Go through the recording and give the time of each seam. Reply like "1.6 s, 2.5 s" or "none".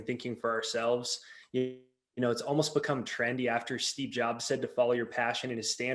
none